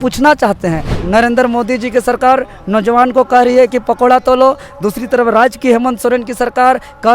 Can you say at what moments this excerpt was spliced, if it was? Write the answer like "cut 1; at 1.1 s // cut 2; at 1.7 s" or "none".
cut 1; at 0.9 s